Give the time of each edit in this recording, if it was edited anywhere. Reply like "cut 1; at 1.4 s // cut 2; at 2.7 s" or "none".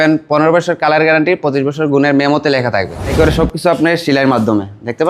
cut 1; at 3.0 s